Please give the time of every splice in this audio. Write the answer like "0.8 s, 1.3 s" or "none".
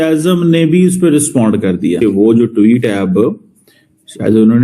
2.0 s